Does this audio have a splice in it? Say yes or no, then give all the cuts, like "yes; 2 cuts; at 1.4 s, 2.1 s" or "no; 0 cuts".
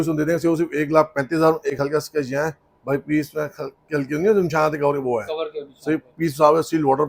no; 0 cuts